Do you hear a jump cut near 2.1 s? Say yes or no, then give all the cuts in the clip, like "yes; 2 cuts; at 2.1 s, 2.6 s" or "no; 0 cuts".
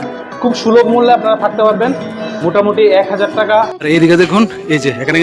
no; 1 cut; at 3.8 s